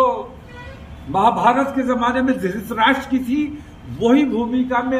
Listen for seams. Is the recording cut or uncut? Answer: uncut